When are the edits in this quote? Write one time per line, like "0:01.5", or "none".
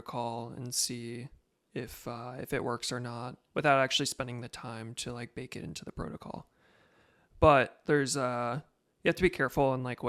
0:03.4